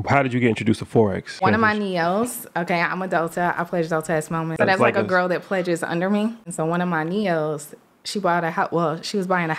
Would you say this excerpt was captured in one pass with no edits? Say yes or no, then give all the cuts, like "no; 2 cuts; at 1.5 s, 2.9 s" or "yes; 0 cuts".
no; 3 cuts; at 1.4 s, 4.5 s, 6.4 s